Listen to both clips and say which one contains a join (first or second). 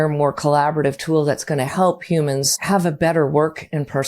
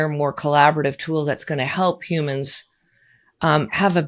first